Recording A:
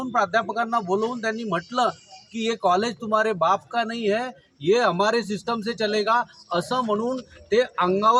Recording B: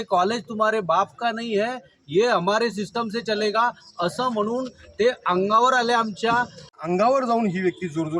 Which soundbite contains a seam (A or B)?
B